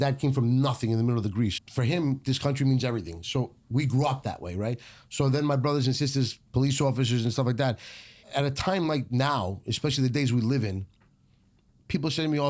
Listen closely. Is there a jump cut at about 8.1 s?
yes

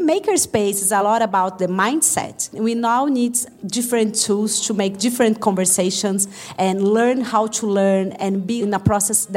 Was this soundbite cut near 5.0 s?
no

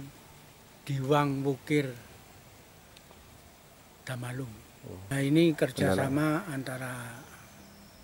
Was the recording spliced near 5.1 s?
yes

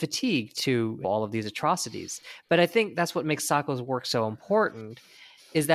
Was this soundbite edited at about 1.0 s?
yes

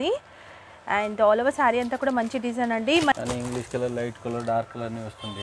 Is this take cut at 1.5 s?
no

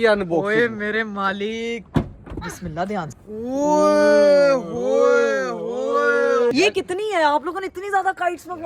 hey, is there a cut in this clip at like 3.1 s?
yes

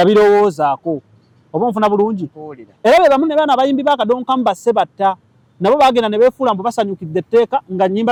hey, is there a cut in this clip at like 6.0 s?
no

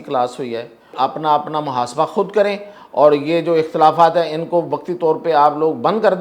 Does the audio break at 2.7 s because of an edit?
no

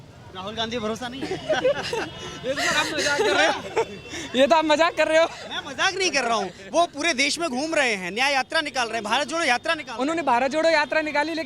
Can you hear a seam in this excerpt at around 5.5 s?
no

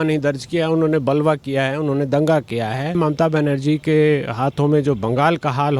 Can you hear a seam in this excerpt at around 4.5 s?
no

